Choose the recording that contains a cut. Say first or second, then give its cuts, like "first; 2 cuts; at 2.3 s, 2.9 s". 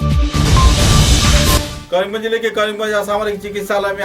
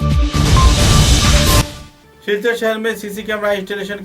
first; 1 cut; at 1.7 s